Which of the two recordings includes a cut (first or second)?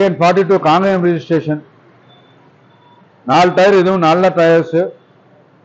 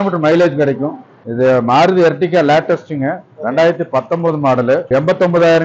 second